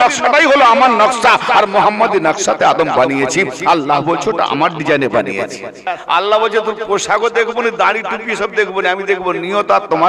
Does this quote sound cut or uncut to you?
cut